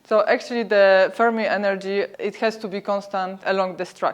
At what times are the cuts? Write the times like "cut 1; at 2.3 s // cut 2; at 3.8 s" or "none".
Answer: cut 1; at 2.1 s // cut 2; at 3.4 s